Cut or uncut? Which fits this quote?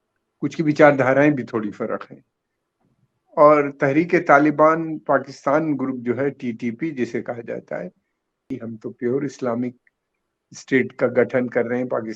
cut